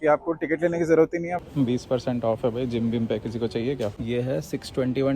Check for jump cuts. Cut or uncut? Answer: cut